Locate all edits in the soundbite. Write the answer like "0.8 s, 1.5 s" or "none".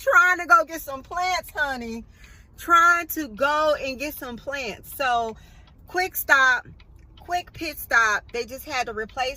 none